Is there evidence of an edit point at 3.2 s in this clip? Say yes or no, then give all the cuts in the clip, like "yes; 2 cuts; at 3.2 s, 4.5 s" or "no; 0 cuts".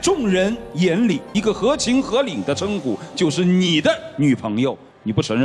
no; 1 cut; at 1.3 s